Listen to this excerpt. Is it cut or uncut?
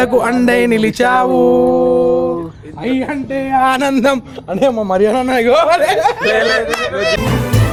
uncut